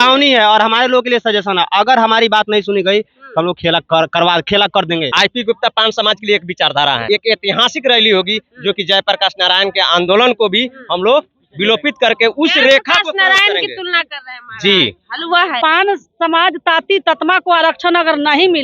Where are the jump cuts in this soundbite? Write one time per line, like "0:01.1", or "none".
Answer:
0:05.1
0:07.0
0:15.6